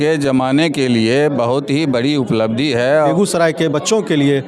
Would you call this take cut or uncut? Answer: cut